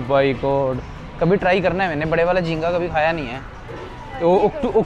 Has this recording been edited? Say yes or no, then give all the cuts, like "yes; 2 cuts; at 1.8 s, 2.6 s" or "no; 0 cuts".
no; 0 cuts